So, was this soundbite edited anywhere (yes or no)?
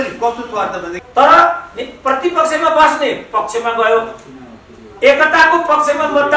yes